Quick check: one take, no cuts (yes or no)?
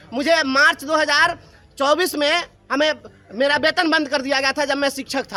yes